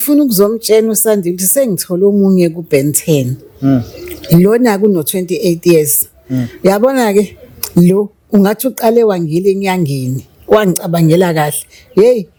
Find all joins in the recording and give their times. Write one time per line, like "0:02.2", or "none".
none